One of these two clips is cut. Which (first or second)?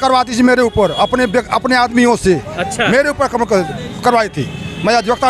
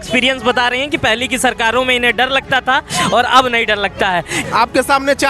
second